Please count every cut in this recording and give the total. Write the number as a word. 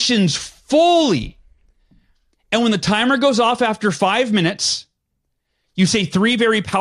zero